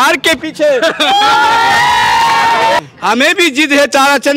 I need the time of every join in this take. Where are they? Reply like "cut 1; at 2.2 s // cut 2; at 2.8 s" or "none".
cut 1; at 2.8 s